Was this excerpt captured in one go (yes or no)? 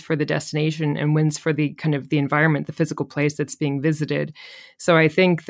yes